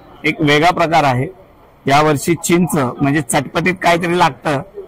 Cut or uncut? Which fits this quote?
uncut